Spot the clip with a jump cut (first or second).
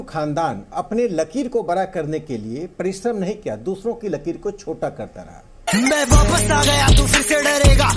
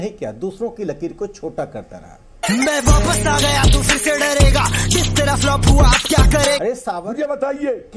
second